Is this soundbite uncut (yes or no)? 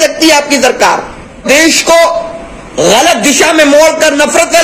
no